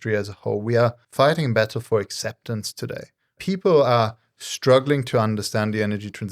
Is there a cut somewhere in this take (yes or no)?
yes